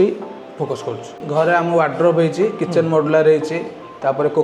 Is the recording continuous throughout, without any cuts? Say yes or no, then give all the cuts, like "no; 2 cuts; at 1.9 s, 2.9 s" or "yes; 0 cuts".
no; 1 cut; at 1.2 s